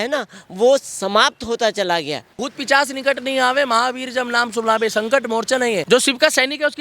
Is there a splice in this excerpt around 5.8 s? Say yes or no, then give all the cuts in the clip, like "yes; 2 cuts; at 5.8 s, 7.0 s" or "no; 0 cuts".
yes; 2 cuts; at 2.3 s, 5.8 s